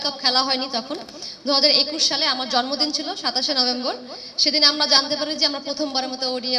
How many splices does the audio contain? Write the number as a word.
zero